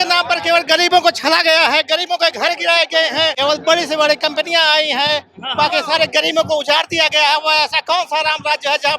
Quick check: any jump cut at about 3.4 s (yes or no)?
yes